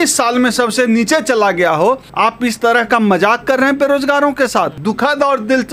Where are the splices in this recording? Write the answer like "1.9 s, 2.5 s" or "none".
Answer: 2.1 s, 4.8 s